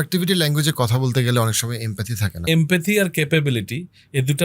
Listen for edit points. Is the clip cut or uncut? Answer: cut